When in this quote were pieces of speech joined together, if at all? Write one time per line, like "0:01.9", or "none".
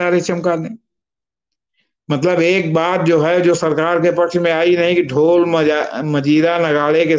none